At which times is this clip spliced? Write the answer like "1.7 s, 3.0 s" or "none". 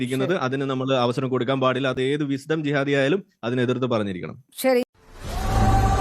4.8 s